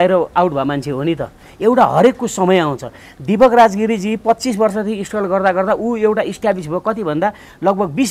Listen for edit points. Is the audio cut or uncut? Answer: uncut